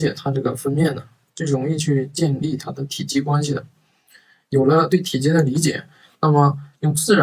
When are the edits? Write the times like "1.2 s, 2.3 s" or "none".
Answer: none